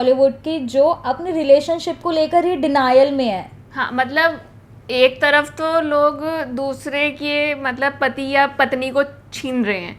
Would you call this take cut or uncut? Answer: uncut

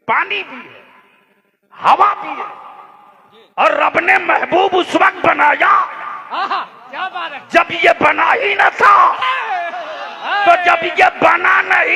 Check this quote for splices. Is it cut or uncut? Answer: uncut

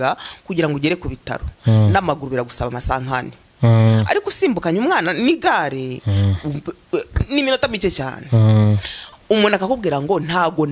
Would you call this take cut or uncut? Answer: uncut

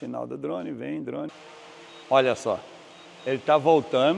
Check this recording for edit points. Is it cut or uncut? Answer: cut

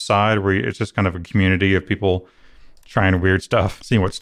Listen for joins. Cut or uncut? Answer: uncut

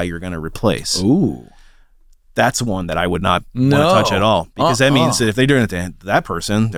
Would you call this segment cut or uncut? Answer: uncut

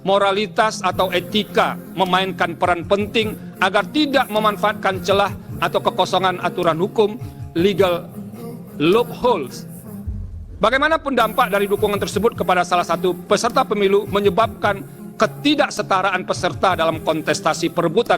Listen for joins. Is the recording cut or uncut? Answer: uncut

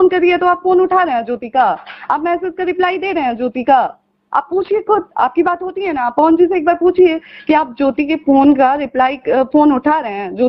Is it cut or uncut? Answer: uncut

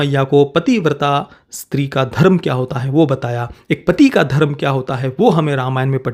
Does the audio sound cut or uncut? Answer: uncut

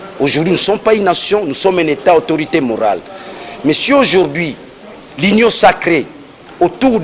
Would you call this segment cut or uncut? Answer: uncut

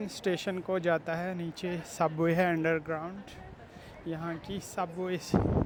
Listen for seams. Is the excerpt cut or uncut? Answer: uncut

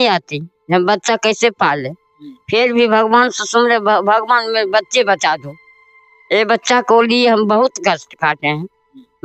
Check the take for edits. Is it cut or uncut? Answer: uncut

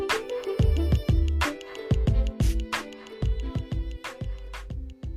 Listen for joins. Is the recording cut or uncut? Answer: uncut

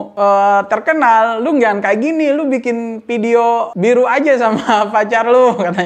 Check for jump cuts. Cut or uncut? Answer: uncut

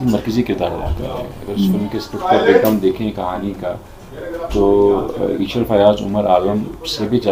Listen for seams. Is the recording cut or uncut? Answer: uncut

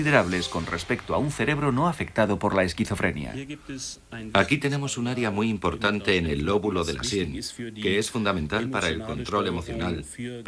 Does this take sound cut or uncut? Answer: cut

